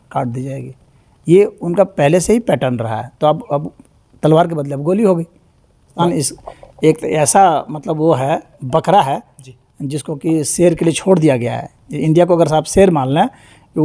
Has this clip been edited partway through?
yes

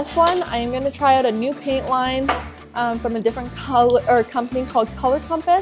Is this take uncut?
yes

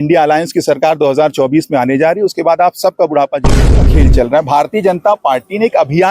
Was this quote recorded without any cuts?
no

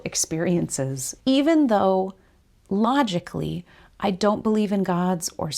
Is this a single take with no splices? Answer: no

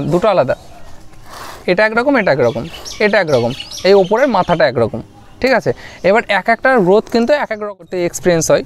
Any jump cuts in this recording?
yes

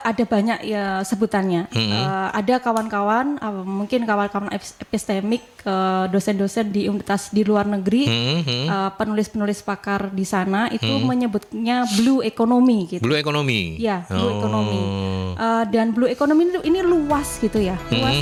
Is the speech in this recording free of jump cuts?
yes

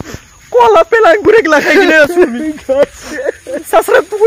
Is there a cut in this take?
no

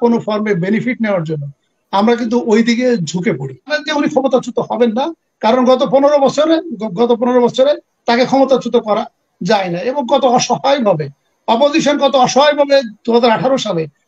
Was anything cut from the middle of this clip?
yes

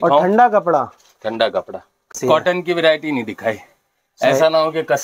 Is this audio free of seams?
no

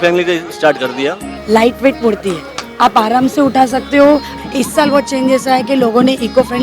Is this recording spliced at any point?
yes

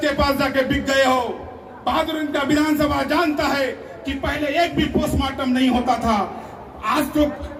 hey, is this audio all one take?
yes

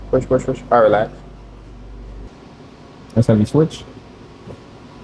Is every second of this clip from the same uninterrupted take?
no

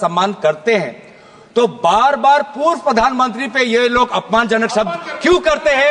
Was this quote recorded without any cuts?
yes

